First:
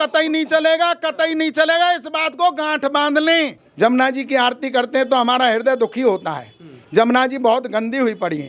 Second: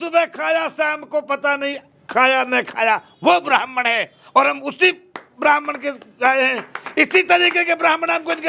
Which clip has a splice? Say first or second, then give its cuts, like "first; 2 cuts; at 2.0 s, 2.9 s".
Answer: first; 1 cut; at 3.6 s